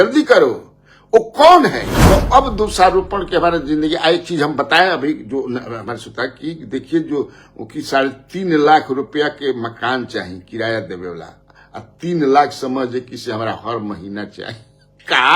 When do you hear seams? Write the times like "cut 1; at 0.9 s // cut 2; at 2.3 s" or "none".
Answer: cut 1; at 1.9 s